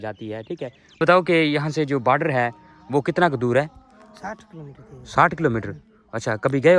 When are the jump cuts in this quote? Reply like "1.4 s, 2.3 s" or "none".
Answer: 1.0 s